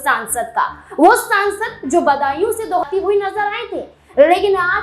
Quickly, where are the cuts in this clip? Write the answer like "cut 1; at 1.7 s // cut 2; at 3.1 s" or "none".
cut 1; at 2.8 s